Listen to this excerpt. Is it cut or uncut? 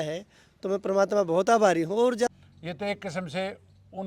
cut